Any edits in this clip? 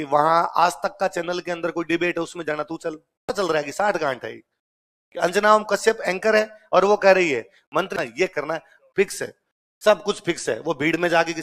yes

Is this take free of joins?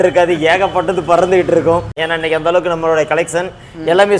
no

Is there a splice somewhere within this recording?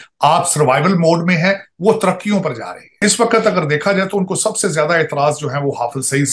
yes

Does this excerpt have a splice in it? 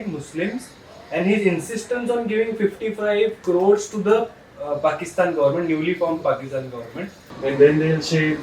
yes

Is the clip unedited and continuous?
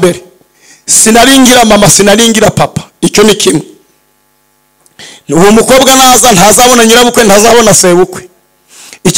yes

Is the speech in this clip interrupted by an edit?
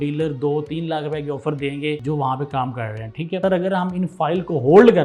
yes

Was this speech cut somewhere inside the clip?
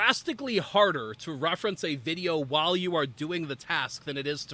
no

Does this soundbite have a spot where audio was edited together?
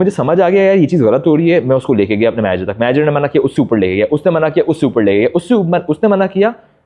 no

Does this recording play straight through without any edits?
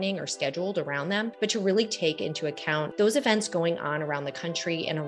no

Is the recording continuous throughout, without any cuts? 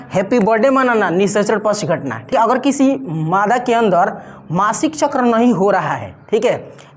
no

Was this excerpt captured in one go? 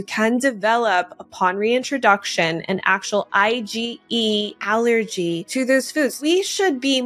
no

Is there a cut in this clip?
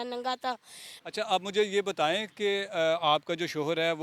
yes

